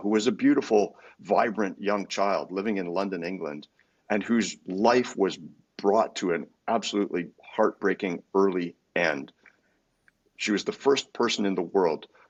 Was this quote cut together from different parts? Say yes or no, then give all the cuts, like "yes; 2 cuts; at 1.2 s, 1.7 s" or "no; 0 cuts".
no; 0 cuts